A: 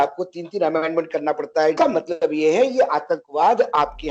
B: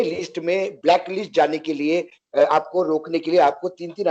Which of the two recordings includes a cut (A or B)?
A